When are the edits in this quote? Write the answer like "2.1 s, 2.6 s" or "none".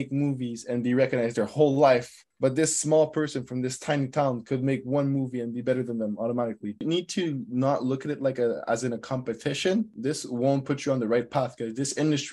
2.2 s, 6.8 s, 10.0 s